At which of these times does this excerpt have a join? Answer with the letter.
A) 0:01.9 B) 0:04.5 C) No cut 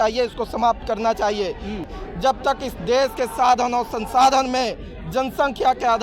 A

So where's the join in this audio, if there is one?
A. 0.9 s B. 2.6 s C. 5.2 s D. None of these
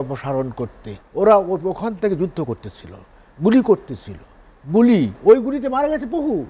A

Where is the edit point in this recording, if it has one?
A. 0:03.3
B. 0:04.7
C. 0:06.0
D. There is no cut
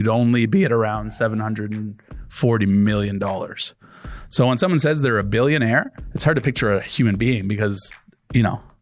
C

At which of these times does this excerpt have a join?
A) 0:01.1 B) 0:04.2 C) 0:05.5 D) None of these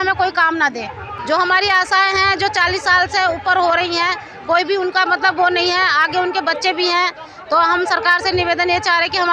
A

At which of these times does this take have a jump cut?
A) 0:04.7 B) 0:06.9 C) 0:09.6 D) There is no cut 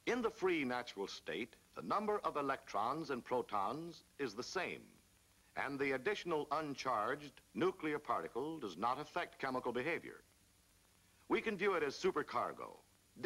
A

